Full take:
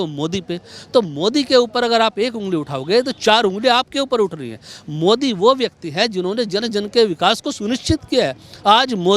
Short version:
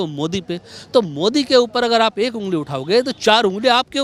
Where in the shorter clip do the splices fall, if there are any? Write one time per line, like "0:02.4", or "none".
none